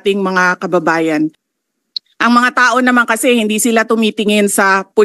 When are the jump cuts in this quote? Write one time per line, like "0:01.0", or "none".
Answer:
0:01.5